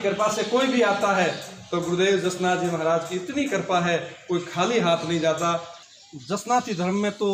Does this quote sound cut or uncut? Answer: cut